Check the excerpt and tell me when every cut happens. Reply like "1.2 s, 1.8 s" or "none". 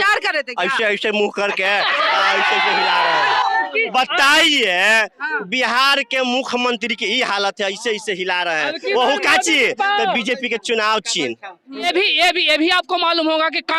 3.7 s, 11.8 s